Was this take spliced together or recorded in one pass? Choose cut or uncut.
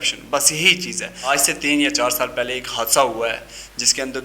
cut